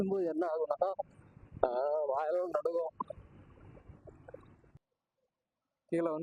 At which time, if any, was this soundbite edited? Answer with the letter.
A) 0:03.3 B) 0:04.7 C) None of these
B